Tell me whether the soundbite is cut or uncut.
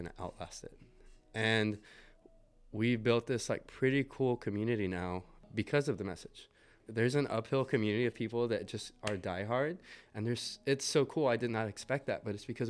cut